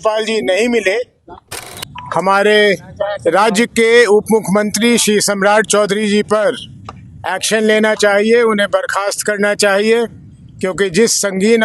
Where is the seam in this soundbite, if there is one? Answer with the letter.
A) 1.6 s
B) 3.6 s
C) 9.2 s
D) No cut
A